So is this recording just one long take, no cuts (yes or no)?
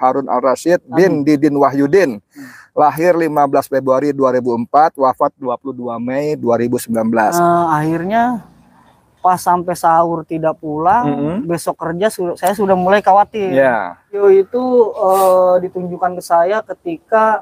no